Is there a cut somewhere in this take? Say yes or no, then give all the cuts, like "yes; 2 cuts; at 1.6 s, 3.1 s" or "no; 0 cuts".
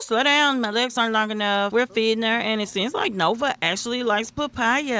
yes; 1 cut; at 1.7 s